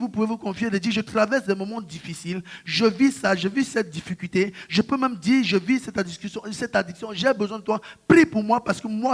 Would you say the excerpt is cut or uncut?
uncut